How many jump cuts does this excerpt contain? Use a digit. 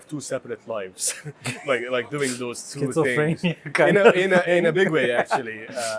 0